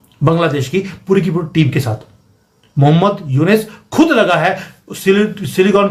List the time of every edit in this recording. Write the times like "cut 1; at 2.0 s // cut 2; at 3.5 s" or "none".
none